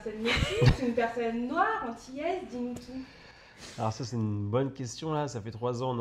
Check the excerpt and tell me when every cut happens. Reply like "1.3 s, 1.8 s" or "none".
none